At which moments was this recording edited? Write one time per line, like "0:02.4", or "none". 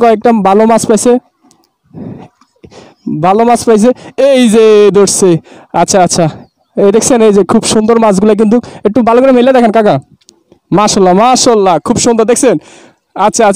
none